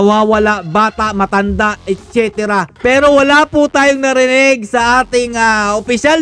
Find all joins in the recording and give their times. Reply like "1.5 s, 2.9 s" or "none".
2.7 s